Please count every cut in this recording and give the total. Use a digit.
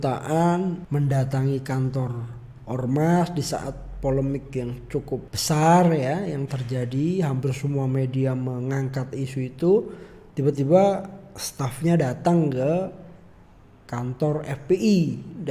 2